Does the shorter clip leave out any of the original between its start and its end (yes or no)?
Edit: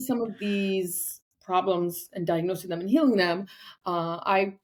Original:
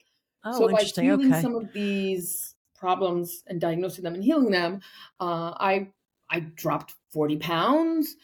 no